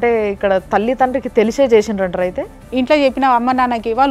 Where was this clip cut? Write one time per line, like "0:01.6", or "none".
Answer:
0:02.6